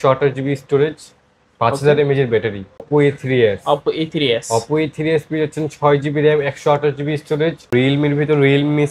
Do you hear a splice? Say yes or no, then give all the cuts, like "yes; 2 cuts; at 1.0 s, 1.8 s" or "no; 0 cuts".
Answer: yes; 2 cuts; at 2.9 s, 7.7 s